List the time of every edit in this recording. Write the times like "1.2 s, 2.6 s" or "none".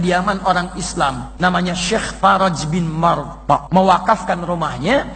1.3 s, 3.6 s